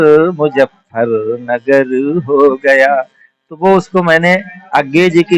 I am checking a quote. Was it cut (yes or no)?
no